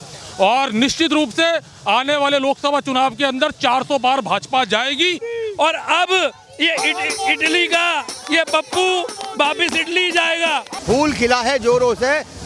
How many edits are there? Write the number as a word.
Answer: two